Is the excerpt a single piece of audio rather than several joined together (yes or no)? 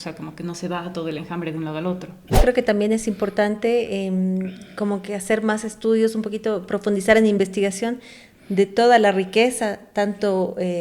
no